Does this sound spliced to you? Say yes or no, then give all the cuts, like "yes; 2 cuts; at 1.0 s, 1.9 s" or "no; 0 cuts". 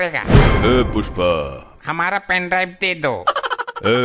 yes; 1 cut; at 1.7 s